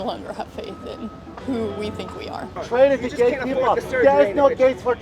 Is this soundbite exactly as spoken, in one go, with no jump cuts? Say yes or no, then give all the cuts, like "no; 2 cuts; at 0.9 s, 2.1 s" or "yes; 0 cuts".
no; 1 cut; at 2.6 s